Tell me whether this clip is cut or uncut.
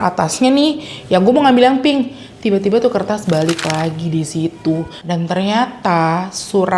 cut